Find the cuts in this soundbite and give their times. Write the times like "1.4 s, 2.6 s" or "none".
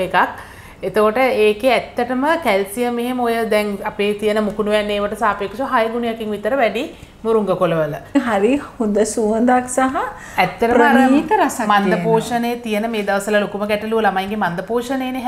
8.2 s